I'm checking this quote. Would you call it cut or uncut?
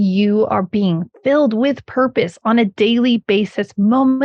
cut